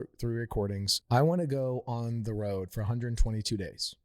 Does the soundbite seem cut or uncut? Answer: cut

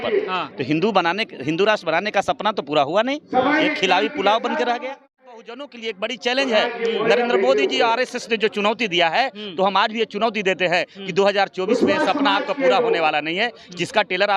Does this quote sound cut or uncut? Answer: cut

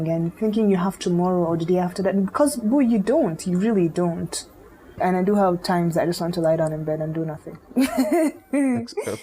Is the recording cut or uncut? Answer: cut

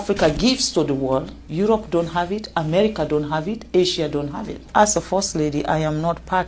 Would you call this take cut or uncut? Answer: cut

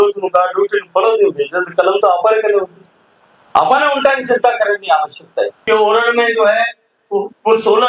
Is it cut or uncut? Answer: cut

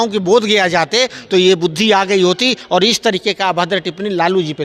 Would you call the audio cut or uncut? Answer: uncut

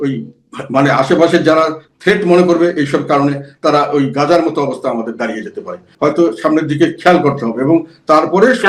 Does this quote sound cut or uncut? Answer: cut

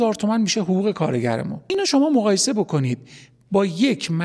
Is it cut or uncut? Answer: cut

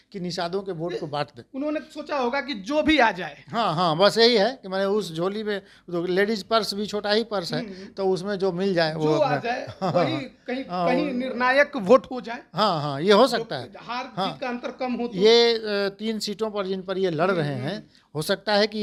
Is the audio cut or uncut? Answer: uncut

